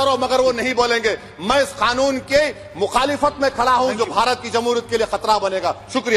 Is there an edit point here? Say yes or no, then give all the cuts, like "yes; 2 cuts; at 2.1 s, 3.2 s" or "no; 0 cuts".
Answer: no; 0 cuts